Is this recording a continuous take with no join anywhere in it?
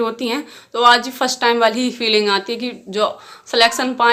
yes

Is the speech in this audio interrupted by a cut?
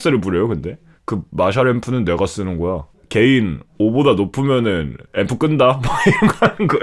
yes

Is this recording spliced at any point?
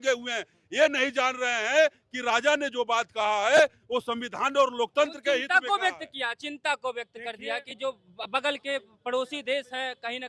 no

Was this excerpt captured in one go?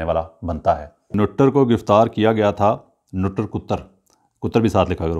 no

